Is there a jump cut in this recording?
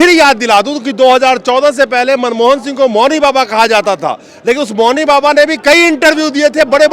no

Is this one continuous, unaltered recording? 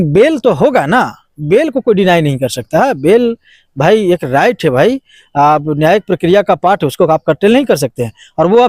yes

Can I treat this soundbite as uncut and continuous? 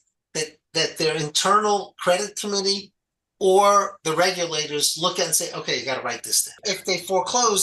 no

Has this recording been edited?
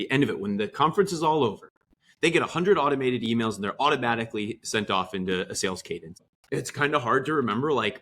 yes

